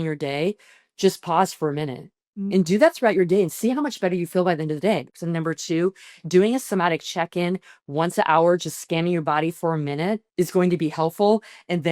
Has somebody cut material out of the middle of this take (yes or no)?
yes